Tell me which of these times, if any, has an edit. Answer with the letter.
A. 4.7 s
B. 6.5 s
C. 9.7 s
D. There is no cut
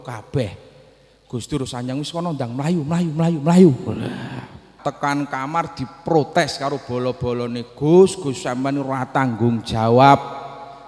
A